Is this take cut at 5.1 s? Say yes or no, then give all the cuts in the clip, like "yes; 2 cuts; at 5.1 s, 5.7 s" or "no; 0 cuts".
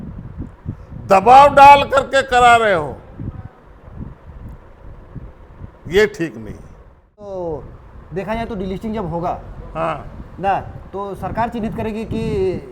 no; 1 cut; at 7.2 s